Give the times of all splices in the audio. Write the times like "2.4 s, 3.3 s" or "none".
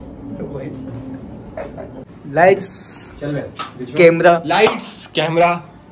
2.0 s